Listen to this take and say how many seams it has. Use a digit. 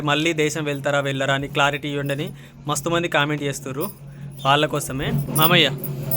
1